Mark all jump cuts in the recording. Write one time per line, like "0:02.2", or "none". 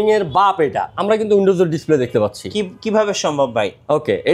0:01.0